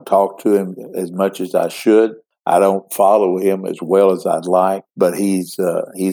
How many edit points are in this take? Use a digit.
2